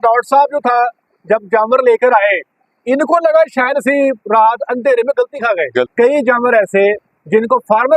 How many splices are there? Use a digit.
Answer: 1